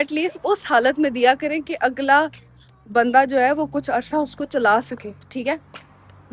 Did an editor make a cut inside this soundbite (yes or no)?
no